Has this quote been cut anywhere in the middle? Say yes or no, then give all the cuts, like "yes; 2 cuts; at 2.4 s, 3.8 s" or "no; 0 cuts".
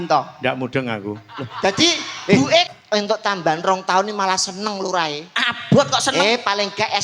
yes; 1 cut; at 2.7 s